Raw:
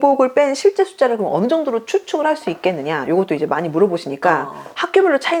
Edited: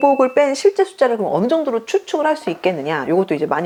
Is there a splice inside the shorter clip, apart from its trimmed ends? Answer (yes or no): no